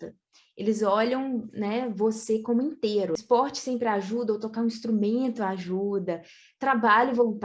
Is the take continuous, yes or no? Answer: no